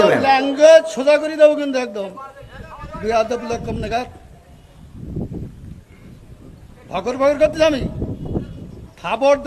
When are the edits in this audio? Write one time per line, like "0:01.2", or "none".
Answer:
none